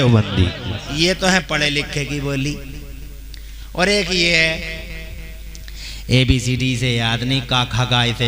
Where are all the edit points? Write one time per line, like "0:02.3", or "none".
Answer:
0:00.9

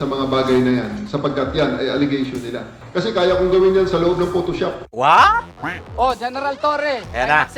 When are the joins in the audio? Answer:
0:02.8
0:04.9
0:05.7

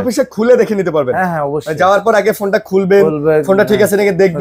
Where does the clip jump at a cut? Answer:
none

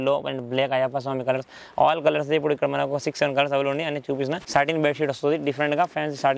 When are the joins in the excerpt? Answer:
0:04.4

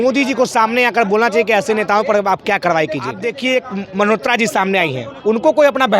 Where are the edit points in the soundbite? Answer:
0:03.2

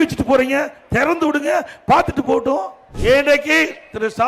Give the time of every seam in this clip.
0:02.8

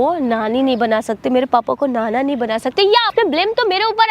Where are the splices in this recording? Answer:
0:03.1

